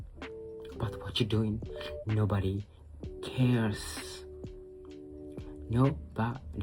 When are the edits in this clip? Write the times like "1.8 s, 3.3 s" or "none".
3.7 s, 5.6 s